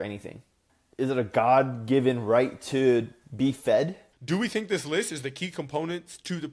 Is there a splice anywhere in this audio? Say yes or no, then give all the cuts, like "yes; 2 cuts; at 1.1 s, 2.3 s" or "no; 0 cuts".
yes; 1 cut; at 4.1 s